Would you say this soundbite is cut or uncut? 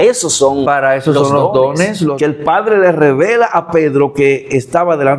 cut